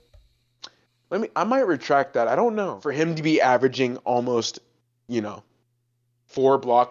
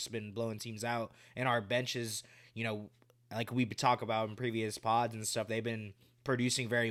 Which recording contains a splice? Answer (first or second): first